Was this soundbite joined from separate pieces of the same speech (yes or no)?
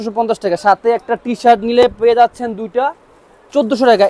no